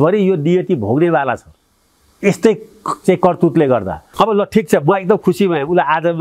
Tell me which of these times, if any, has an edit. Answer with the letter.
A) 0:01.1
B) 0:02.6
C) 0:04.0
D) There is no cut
C